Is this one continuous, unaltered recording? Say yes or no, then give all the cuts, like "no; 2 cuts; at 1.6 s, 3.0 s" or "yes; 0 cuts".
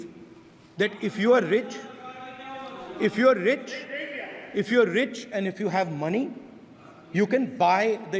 yes; 0 cuts